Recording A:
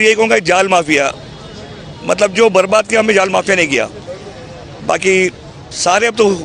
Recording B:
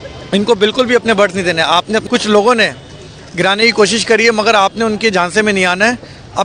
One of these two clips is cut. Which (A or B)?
B